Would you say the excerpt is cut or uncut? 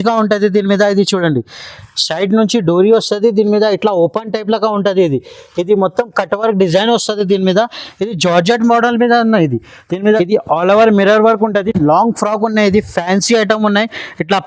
cut